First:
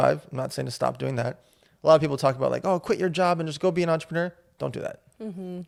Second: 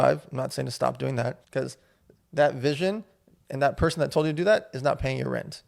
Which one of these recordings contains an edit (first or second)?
second